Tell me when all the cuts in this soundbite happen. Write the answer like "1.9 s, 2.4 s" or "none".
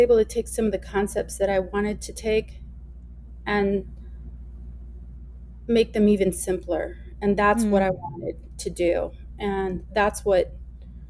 none